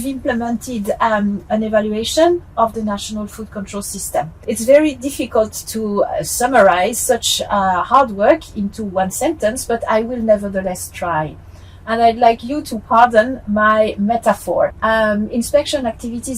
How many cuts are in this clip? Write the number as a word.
two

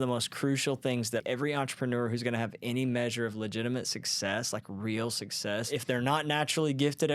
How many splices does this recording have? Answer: two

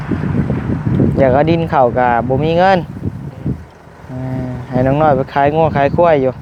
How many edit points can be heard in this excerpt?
zero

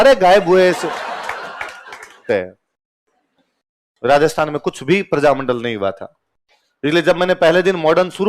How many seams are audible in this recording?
one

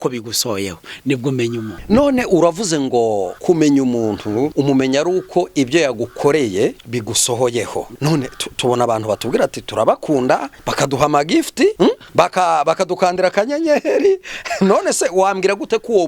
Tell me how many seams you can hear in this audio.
seven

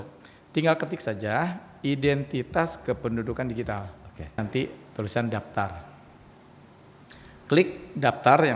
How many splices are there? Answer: one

